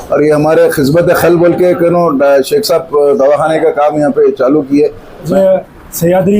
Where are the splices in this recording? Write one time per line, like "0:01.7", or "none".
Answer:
0:05.3